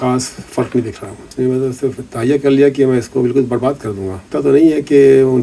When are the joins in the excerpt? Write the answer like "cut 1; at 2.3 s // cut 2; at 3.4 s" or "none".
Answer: cut 1; at 1.2 s // cut 2; at 4.2 s